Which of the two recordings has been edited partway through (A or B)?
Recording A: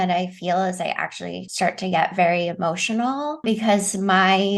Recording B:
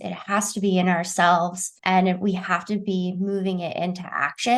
A